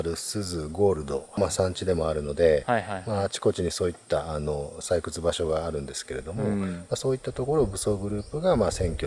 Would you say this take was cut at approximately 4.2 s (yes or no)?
no